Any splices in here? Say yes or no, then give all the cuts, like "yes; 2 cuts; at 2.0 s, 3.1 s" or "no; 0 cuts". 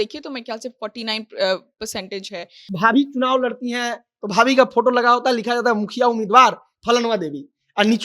yes; 1 cut; at 2.6 s